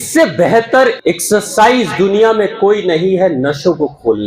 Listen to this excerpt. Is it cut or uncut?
cut